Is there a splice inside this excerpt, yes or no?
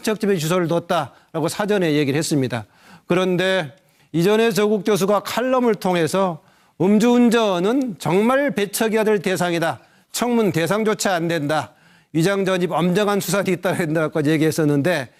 no